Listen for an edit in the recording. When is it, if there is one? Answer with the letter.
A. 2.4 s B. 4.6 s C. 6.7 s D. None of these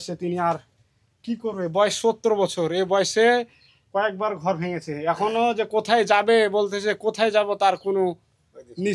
D